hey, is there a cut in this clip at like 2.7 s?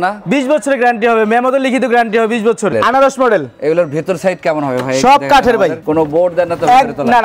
yes; 2 cuts; at 2.7 s, 5.8 s

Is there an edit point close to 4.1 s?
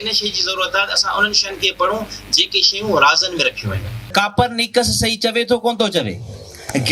yes; 1 cut; at 4.1 s

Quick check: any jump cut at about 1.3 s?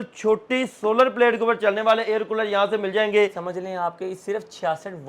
no; 1 cut; at 3.4 s

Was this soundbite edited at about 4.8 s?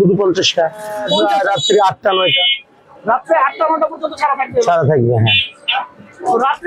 no; 1 cut; at 1.0 s

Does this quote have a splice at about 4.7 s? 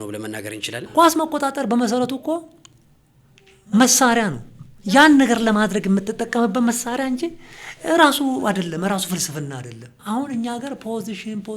no; 2 cuts; at 0.9 s, 9.9 s

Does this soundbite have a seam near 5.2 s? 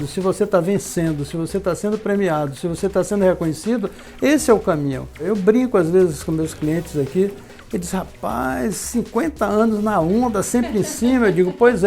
yes; 1 cut; at 5.2 s

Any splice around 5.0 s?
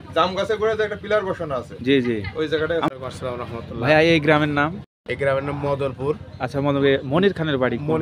no; 1 cut; at 2.9 s

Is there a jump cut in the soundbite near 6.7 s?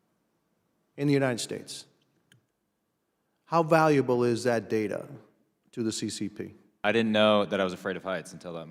yes; 1 cut; at 6.7 s

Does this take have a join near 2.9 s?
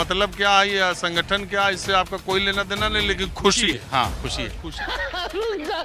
no; 1 cut; at 4.7 s

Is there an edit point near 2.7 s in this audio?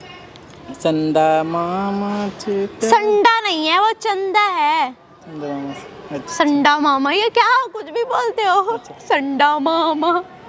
no; 0 cuts

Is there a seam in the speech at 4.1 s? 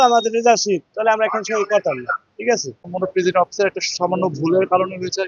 no; 1 cut; at 2.8 s

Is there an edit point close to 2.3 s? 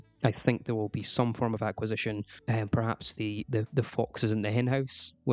yes; 1 cut; at 2.3 s

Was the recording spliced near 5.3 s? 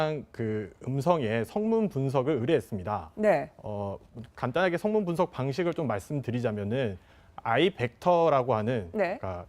no; 1 cut; at 7.6 s

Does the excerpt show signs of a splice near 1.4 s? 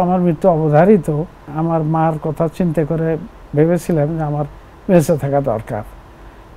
yes; 1 cut; at 1.4 s

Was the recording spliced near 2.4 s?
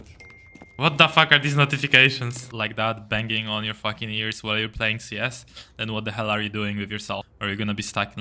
yes; 2 cuts; at 2.4 s, 7.3 s

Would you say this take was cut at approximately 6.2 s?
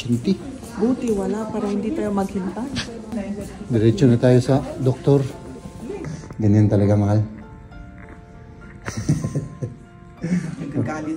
yes; 2 cuts; at 3.1 s, 6.2 s

